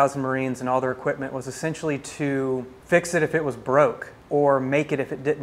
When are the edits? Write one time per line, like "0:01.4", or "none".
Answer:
0:02.7
0:04.1